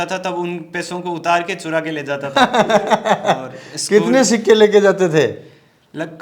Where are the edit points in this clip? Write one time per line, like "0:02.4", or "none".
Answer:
none